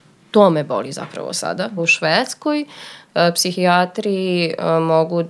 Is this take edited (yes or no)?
yes